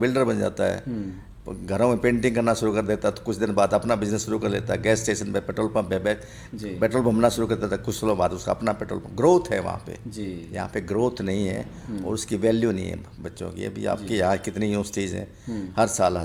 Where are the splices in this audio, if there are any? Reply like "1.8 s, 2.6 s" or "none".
none